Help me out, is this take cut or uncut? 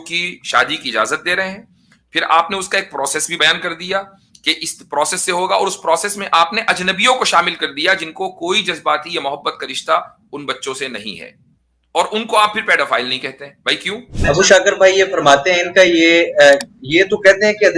cut